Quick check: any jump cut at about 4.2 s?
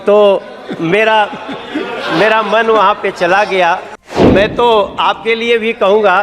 yes; 1 cut; at 4.2 s

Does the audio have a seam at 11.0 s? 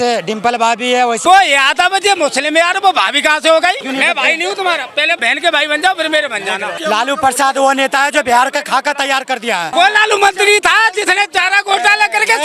no; 5 cuts; at 1.2 s, 3.8 s, 5.2 s, 6.7 s, 9.7 s

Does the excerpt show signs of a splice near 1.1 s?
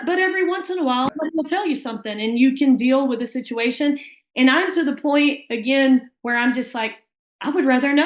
yes; 1 cut; at 1.1 s

